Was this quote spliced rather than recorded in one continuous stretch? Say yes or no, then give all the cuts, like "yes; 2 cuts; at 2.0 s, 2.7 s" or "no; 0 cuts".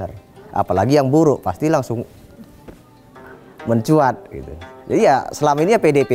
no; 0 cuts